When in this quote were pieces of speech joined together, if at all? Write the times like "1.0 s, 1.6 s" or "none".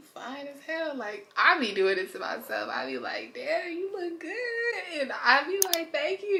none